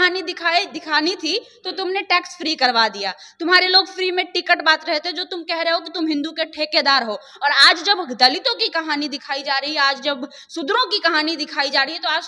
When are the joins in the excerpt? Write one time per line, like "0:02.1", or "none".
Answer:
none